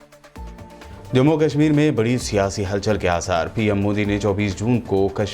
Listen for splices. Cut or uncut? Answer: cut